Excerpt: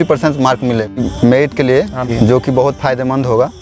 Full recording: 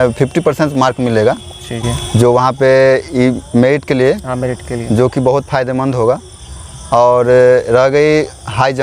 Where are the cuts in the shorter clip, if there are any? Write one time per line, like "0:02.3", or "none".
0:01.0
0:02.0